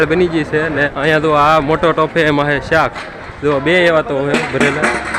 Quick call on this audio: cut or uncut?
cut